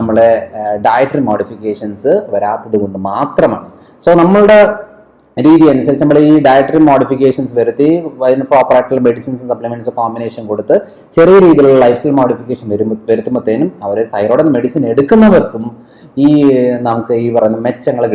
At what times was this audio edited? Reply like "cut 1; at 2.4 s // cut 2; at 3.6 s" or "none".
none